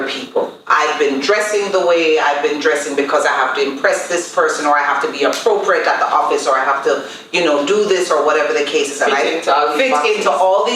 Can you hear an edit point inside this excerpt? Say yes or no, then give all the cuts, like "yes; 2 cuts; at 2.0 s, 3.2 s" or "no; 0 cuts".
no; 0 cuts